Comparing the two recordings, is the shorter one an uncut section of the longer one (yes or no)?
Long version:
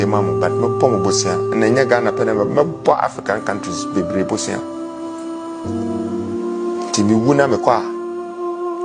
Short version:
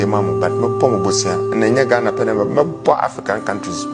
yes